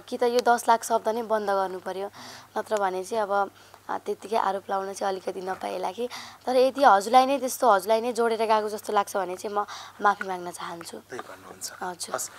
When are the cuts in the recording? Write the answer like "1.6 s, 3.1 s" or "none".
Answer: none